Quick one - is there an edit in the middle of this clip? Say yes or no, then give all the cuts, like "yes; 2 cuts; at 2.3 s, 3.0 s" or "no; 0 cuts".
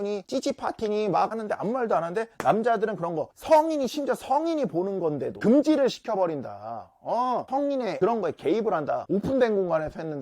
yes; 1 cut; at 9.0 s